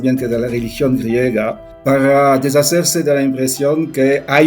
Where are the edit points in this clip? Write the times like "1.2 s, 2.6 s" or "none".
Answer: 1.7 s